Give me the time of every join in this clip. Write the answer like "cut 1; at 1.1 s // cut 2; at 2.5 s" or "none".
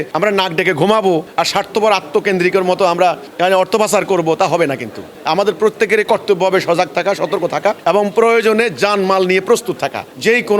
none